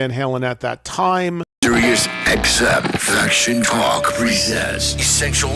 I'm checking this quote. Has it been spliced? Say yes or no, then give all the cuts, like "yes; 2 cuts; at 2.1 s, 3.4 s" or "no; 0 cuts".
yes; 1 cut; at 1.5 s